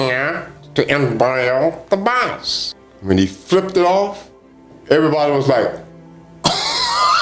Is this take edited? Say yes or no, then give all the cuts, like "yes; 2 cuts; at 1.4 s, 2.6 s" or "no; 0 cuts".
no; 0 cuts